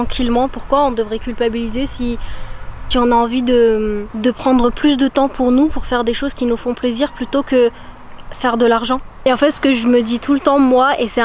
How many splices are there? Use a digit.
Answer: 0